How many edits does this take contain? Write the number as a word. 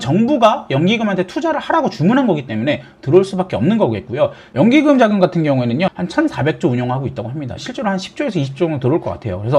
three